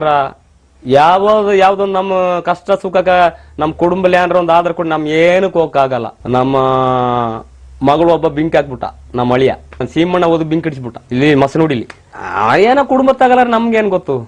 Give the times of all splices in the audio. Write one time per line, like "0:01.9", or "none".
none